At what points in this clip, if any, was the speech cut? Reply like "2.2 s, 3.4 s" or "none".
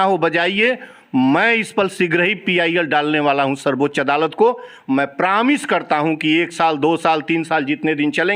none